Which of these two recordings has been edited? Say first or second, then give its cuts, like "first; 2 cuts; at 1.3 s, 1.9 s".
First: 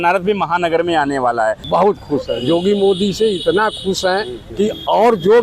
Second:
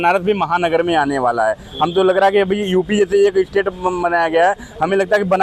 first; 2 cuts; at 1.6 s, 4.4 s